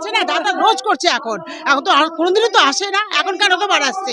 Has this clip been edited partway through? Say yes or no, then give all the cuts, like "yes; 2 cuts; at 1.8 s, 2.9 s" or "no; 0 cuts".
no; 0 cuts